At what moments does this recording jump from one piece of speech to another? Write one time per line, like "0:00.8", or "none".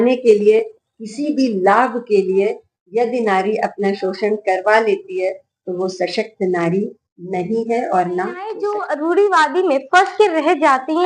none